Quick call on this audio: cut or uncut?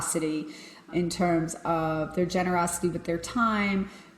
uncut